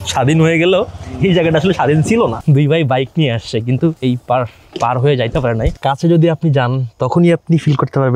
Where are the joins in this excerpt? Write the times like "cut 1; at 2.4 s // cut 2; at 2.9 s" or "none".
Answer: cut 1; at 2.4 s // cut 2; at 4.0 s // cut 3; at 5.7 s